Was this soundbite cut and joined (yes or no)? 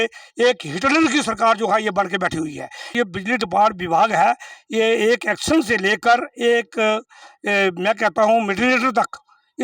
yes